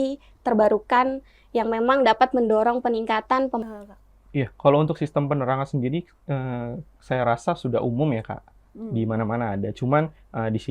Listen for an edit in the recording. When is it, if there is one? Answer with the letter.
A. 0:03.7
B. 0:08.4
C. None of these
A